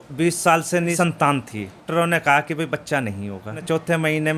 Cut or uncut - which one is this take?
cut